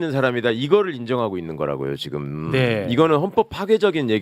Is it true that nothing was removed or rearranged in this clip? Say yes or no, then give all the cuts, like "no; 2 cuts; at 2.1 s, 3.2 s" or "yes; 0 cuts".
yes; 0 cuts